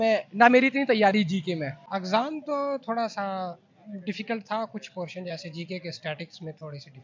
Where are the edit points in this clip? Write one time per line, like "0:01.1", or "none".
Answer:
0:01.8